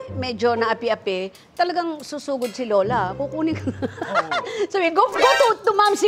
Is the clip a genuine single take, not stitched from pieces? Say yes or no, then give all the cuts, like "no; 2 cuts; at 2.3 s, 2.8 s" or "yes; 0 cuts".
yes; 0 cuts